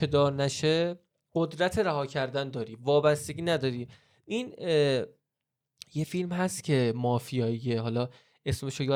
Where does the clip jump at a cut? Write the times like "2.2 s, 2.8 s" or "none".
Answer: none

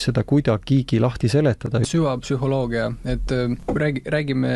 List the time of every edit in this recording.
1.9 s, 3.6 s

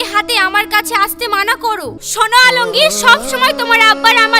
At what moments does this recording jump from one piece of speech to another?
1.9 s

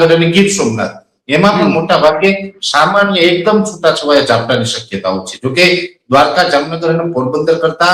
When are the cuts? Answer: none

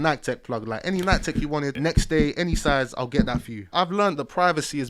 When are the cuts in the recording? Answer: 1.7 s, 3.7 s

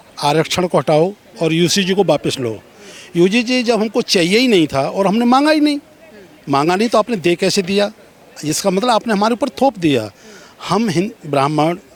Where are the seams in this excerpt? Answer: none

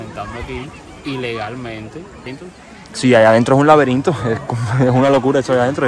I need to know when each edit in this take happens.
2.3 s

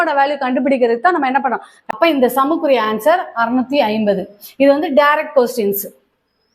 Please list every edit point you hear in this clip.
1.8 s

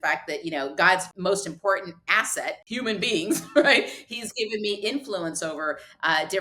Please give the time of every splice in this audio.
1.1 s, 2.6 s

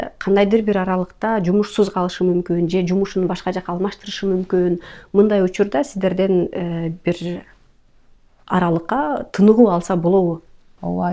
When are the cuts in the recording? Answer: none

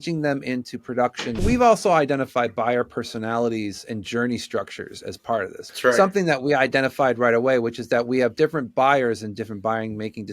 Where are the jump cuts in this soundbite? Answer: 1.4 s, 5.6 s

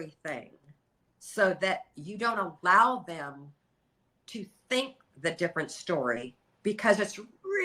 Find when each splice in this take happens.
none

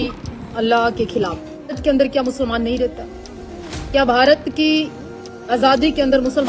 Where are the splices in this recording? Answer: 1.8 s

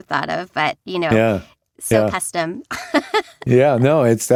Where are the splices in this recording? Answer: none

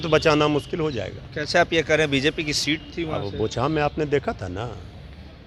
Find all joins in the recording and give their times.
none

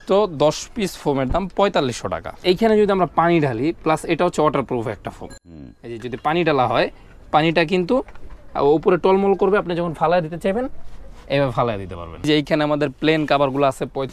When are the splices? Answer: 2.3 s, 12.3 s

